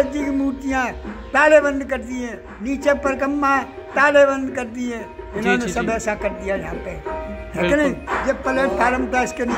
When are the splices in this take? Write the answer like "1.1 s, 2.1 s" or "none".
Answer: none